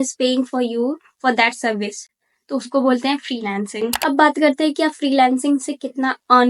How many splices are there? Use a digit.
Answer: 0